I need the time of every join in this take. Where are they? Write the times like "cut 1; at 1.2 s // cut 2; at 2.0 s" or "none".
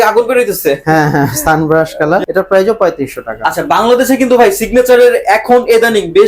cut 1; at 2.2 s // cut 2; at 3.3 s